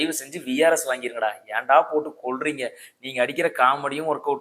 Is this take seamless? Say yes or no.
yes